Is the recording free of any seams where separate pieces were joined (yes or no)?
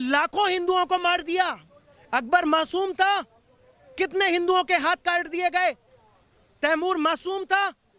yes